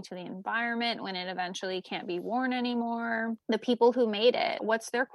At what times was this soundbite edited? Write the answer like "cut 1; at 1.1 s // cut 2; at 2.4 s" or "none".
none